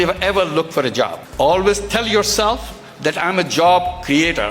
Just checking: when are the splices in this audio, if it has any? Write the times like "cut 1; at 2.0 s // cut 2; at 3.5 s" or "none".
cut 1; at 1.2 s